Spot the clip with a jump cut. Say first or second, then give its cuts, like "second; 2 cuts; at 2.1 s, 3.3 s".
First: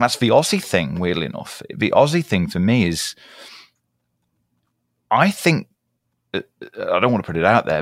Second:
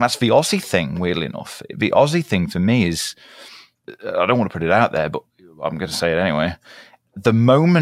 second; 1 cut; at 3.9 s